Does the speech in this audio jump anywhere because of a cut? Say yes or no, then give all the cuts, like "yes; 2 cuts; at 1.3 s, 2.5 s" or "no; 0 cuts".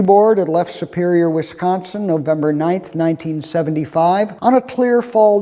yes; 1 cut; at 4.3 s